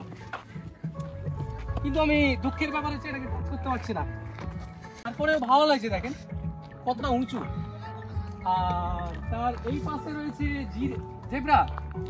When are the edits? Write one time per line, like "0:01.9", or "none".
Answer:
0:05.1